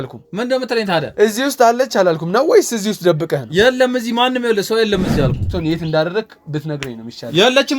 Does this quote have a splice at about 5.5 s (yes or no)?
yes